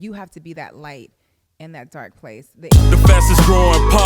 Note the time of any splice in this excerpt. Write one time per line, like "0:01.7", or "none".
0:02.7